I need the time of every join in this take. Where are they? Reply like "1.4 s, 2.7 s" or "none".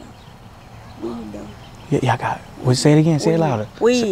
none

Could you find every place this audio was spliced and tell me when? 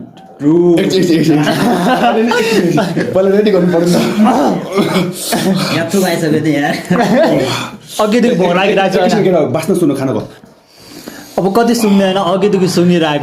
none

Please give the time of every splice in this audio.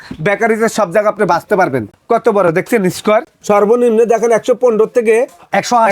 1.9 s, 3.3 s

